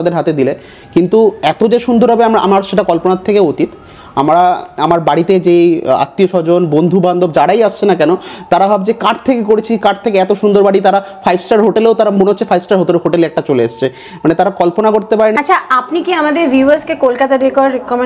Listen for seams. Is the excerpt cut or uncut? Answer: uncut